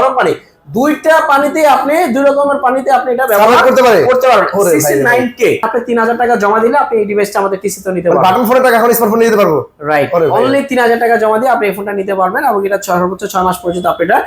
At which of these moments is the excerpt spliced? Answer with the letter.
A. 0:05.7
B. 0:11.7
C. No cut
A